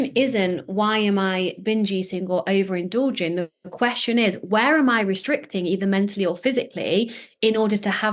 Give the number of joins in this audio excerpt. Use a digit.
0